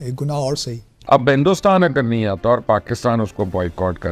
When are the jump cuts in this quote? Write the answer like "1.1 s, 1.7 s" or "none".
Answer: 1.0 s